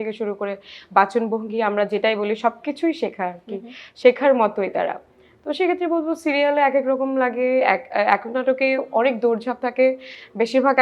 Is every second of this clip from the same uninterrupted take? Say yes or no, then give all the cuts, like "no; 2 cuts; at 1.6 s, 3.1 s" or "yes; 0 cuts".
yes; 0 cuts